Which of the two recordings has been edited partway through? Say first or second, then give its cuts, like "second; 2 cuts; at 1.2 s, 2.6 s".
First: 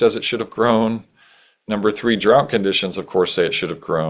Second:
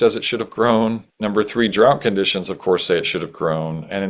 second; 1 cut; at 1.1 s